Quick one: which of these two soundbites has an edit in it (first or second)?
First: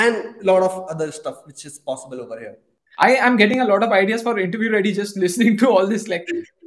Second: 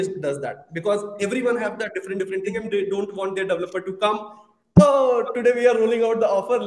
first